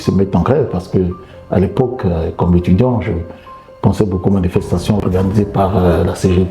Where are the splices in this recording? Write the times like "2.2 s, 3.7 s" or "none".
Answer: 5.0 s